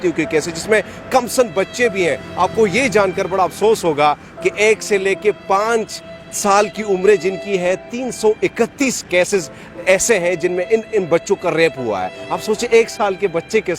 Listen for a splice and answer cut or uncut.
uncut